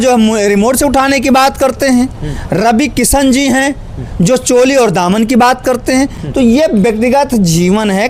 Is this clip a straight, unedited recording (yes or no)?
yes